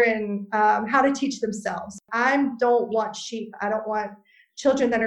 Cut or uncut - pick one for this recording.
cut